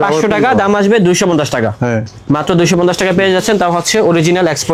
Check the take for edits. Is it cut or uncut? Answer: uncut